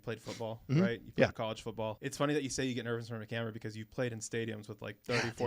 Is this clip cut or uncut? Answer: cut